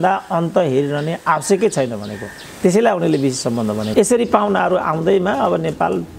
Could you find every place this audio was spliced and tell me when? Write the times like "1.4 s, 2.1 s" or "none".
3.9 s